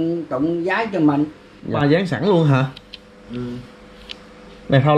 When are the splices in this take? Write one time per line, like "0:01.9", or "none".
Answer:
0:01.7